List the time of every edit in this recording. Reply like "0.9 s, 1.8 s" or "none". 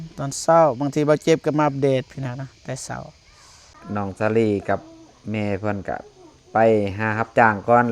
3.8 s